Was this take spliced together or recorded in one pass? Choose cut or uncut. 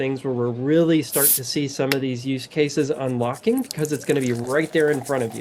uncut